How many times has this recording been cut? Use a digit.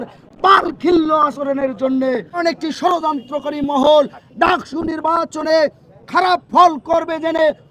1